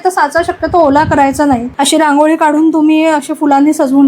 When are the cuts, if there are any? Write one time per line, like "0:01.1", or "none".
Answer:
0:01.7